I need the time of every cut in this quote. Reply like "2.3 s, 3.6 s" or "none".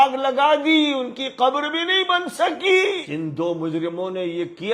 3.0 s